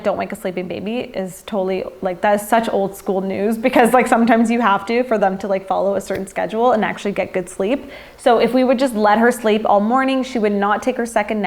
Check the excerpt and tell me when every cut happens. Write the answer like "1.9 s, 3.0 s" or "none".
none